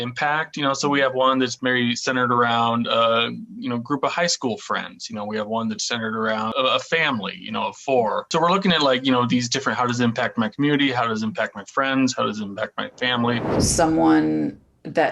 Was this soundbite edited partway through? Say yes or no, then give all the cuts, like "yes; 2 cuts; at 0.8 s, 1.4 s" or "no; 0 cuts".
yes; 3 cuts; at 6.5 s, 8.3 s, 13.5 s